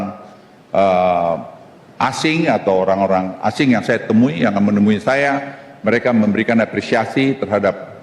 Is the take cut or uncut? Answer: uncut